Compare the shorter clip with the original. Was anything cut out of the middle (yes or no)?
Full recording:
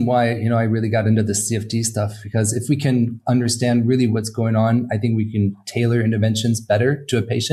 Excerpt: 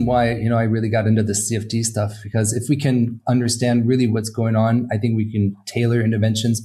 no